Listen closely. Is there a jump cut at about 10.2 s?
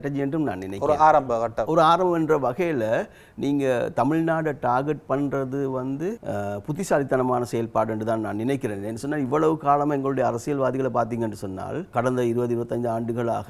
no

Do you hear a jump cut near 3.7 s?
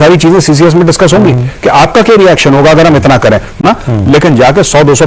yes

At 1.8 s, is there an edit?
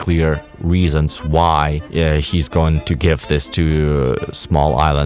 yes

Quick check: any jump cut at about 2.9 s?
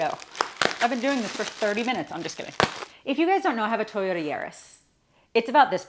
yes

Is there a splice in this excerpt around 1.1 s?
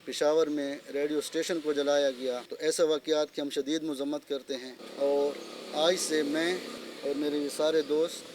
no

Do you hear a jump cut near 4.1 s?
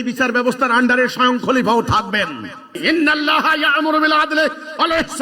no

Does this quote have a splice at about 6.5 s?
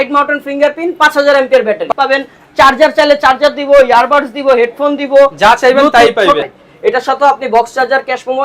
yes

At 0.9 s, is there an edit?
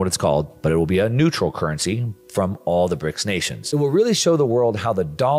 no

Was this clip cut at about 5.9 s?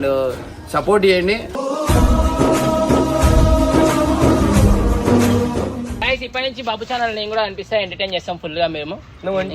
yes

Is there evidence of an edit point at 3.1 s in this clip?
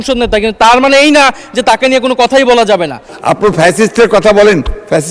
yes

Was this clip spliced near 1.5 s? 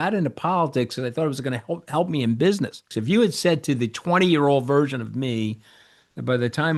no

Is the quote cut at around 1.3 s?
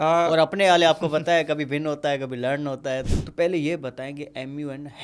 no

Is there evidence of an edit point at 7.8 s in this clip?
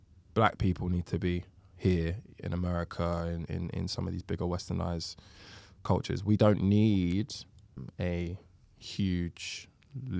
yes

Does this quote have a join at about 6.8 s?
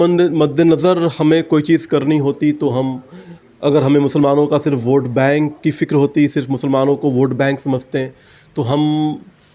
no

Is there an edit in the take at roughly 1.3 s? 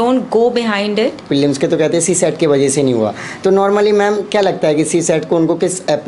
yes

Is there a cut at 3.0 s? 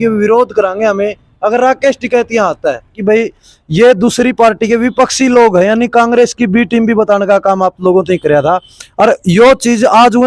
yes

